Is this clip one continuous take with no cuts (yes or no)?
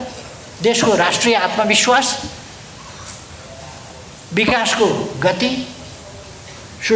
yes